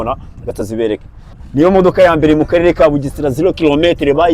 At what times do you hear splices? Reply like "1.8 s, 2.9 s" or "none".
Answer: 1.4 s